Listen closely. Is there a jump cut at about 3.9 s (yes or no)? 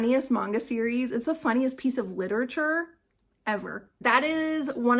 yes